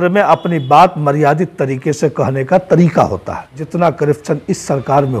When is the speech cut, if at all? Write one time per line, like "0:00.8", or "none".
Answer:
0:03.6